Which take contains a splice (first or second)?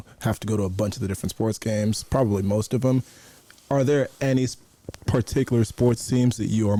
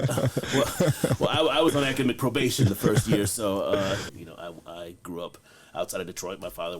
second